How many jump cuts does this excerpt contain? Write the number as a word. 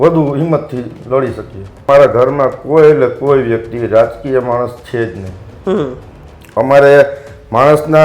one